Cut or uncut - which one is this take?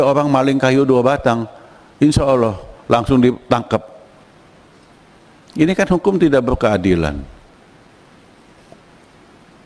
uncut